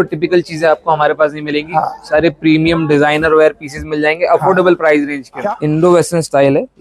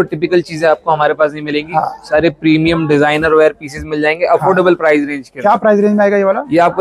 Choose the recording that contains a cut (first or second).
first